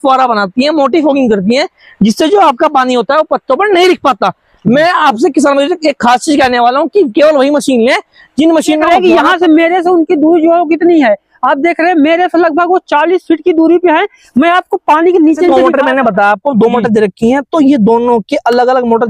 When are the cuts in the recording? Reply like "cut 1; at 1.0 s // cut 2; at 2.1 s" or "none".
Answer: cut 1; at 8.8 s // cut 2; at 15.5 s